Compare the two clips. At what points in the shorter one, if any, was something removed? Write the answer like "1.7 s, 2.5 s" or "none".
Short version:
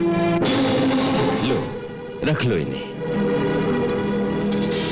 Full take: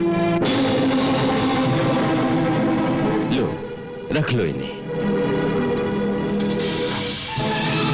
1.4 s